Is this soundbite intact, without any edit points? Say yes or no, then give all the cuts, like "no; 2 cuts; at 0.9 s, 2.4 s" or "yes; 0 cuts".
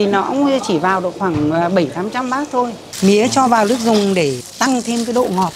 no; 1 cut; at 2.8 s